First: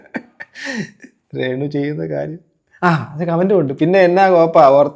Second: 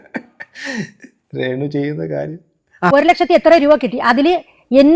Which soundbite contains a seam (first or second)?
second